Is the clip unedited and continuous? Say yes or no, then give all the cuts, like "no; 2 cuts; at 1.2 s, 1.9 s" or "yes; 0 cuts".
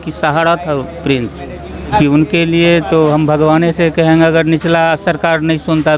no; 1 cut; at 1.9 s